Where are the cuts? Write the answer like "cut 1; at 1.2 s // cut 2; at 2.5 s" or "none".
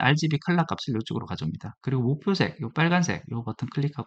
none